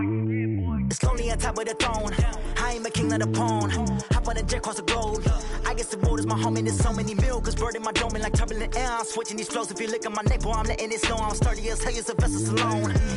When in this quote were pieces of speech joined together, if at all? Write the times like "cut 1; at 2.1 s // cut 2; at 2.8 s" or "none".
cut 1; at 0.9 s